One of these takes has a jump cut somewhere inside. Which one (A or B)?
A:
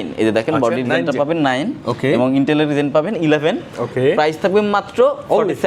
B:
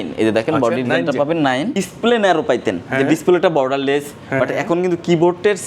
B